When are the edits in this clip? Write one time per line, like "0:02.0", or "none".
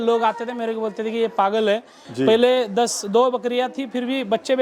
0:02.0